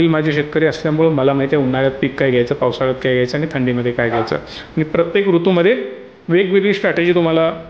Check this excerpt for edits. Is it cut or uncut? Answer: uncut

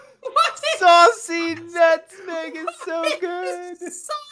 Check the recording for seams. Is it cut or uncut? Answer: uncut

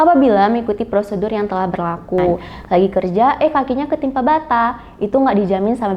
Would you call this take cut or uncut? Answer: cut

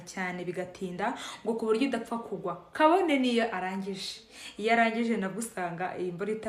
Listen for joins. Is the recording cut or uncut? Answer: uncut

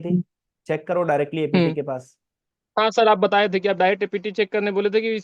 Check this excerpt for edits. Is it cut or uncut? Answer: uncut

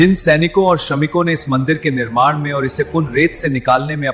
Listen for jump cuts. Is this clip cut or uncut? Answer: uncut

